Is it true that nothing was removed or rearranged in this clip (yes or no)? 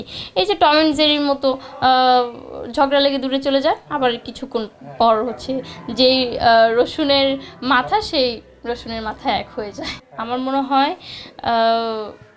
yes